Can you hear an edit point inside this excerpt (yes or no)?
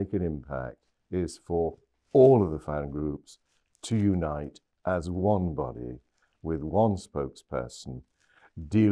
no